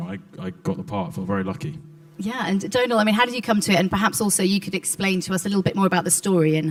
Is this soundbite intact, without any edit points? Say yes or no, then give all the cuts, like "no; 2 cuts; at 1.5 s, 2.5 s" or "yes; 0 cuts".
yes; 0 cuts